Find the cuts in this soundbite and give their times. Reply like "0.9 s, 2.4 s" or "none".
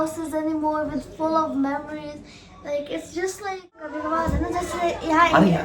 3.9 s